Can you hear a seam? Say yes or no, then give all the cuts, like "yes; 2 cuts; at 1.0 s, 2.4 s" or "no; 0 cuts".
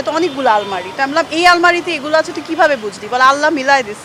no; 0 cuts